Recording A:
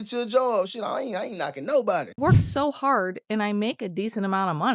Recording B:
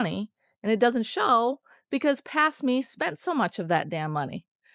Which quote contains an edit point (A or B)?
A